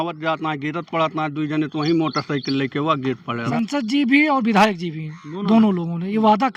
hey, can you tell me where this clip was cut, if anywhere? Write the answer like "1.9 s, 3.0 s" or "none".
3.5 s